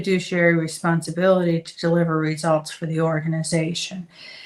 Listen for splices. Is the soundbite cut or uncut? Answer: uncut